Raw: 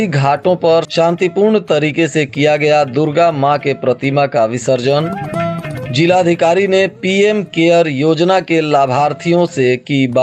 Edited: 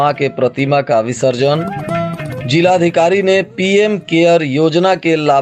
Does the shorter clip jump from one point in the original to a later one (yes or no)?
no